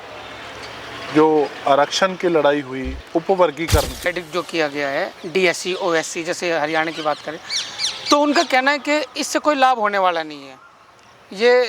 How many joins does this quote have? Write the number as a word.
one